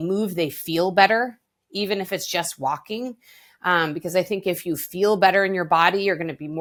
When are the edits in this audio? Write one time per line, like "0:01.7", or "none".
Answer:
none

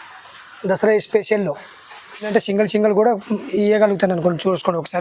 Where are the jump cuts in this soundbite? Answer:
none

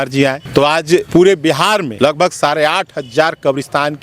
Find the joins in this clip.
0:00.9
0:01.9

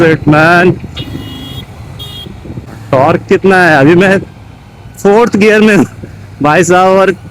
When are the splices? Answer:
0:02.7

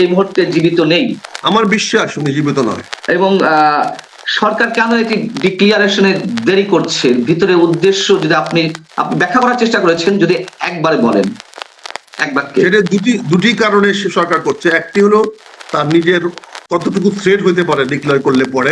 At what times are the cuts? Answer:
0:01.3
0:02.9

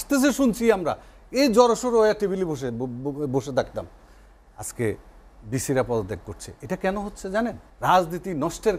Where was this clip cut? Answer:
0:07.7

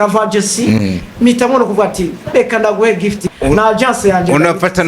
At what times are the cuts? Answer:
0:03.3

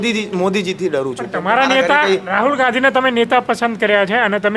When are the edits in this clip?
none

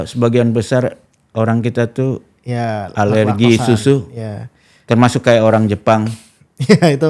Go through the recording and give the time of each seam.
none

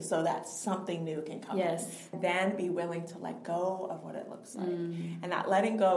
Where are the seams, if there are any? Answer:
0:02.1

